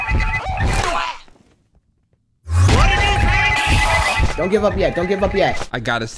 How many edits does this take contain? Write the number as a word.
one